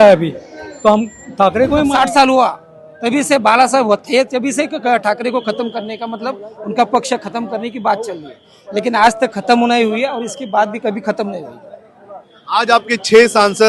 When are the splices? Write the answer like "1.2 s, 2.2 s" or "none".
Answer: 1.9 s